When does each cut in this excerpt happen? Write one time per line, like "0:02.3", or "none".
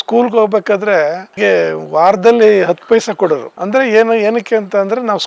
0:03.5